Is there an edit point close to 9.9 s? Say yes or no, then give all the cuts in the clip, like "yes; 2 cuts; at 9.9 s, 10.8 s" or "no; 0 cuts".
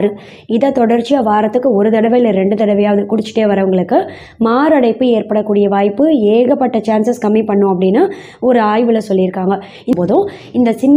yes; 1 cut; at 9.9 s